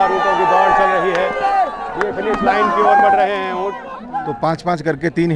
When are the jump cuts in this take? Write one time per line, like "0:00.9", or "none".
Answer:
0:04.0